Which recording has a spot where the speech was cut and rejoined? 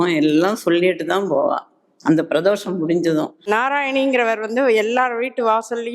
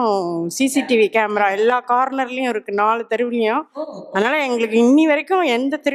first; 1 cut; at 3.5 s

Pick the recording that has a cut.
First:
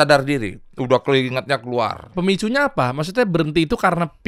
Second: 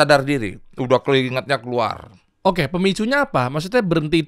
first; 1 cut; at 2.1 s

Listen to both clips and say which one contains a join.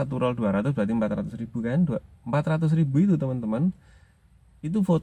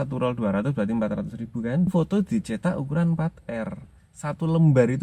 second; 2 cuts; at 1.9 s, 4.0 s

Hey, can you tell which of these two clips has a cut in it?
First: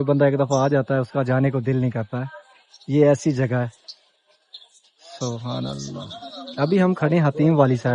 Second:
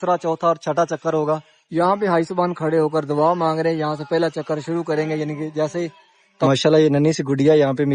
second; 1 cut; at 6.5 s

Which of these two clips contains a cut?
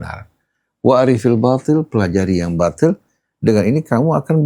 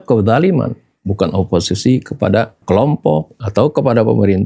second; 2 cuts; at 2.6 s, 3.4 s

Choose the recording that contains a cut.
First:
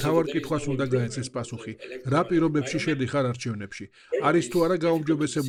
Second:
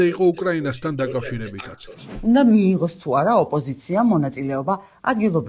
second; 1 cut; at 2.0 s

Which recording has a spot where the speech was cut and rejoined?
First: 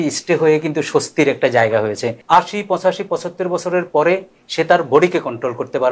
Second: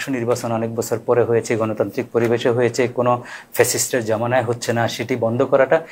first; 1 cut; at 2.1 s

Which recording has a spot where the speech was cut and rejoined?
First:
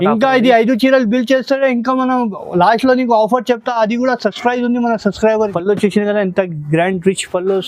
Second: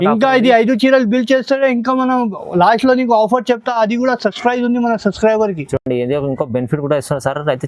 first; 1 cut; at 5.5 s

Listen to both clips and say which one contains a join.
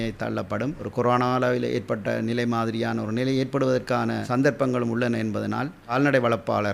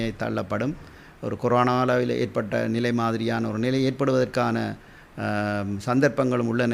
first; 3 cuts; at 0.8 s, 4.2 s, 5.8 s

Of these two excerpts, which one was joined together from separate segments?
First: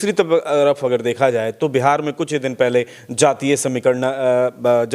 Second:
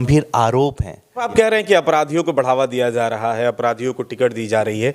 second; 1 cut; at 1.3 s

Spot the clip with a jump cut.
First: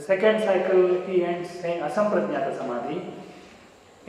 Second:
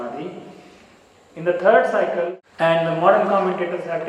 second; 1 cut; at 2.4 s

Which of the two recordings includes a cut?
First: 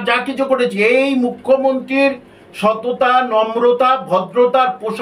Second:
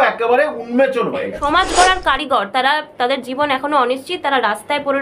second; 1 cut; at 1.4 s

